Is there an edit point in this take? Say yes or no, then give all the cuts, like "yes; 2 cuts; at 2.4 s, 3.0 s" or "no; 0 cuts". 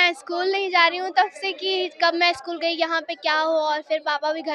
no; 0 cuts